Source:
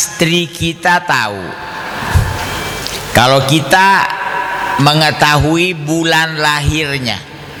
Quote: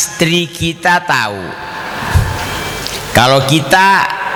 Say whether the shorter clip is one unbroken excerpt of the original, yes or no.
yes